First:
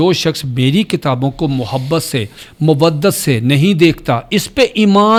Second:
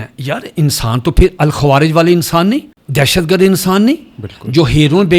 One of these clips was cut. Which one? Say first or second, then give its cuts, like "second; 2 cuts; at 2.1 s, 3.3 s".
second; 1 cut; at 2.8 s